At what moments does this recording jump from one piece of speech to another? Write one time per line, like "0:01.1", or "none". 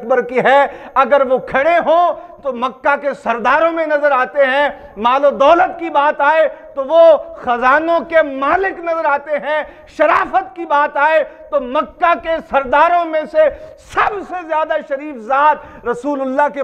none